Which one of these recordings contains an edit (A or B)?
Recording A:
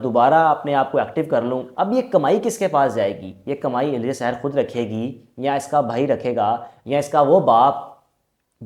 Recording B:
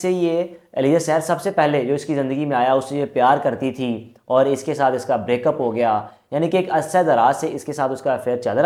A